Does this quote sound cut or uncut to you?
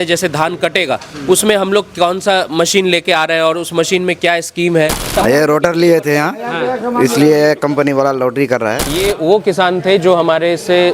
cut